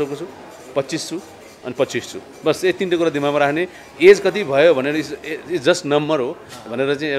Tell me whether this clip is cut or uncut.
uncut